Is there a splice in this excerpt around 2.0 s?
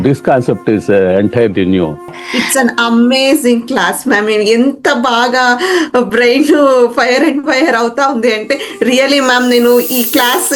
yes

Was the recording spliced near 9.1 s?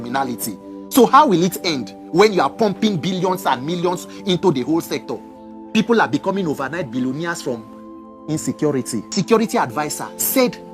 yes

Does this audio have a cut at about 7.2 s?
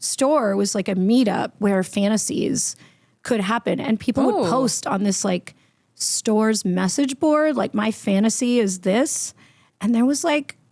no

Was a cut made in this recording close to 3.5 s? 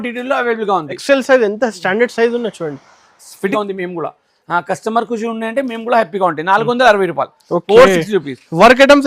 yes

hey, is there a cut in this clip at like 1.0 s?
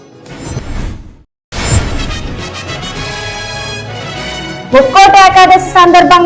yes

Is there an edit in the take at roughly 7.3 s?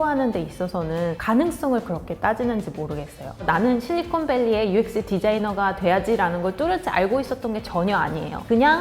no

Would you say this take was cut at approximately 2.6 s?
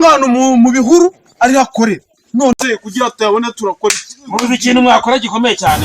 yes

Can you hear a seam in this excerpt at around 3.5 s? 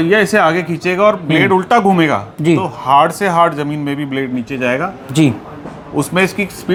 no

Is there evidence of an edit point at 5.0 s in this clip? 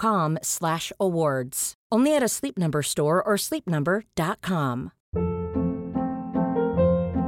yes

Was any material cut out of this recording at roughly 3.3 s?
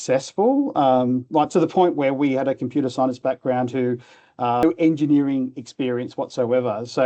no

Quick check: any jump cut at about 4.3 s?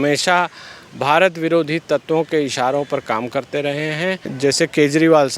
yes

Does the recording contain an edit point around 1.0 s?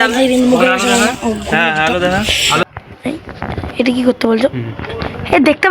no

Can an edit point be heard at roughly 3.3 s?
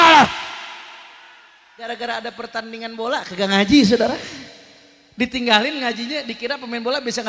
no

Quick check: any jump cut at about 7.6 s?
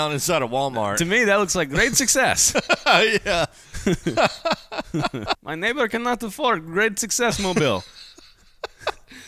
no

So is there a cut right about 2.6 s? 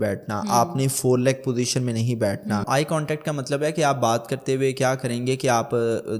yes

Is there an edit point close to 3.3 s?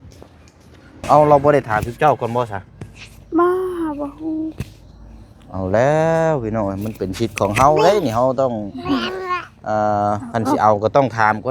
no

